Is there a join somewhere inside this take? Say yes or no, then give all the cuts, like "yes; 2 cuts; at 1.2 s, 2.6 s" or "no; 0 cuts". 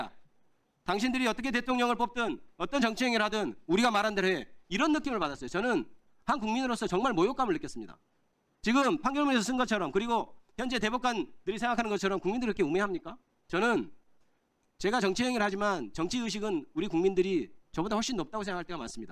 no; 0 cuts